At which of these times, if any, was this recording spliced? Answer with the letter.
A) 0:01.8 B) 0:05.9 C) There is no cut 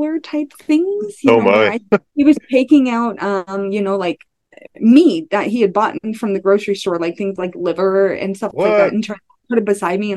A